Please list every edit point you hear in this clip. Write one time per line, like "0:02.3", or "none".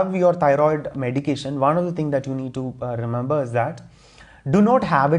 none

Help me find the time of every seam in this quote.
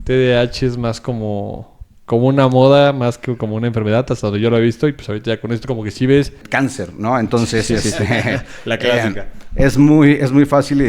0:06.4

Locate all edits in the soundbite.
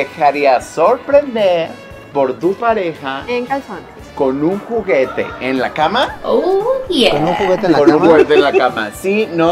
none

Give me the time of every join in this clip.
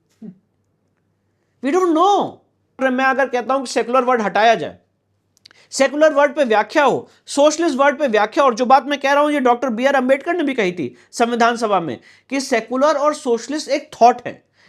0:02.8

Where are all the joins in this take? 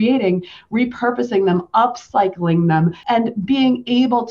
0:03.0

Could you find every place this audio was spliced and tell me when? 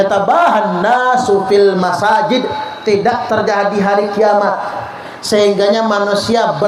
none

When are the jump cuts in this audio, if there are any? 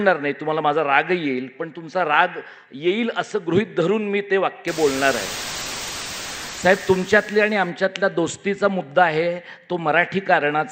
0:05.9

